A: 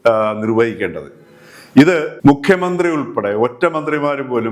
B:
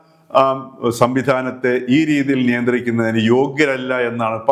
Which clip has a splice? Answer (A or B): A